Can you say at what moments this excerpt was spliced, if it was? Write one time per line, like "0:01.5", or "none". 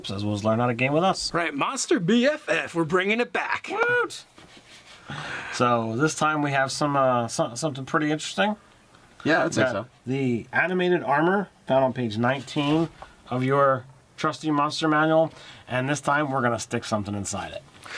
0:05.8